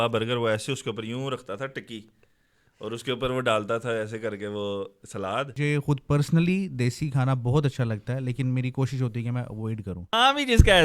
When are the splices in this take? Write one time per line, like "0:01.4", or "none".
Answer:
0:05.6
0:10.1